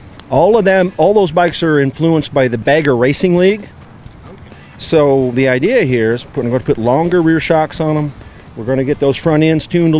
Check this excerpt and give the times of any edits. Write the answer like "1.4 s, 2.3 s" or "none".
2.6 s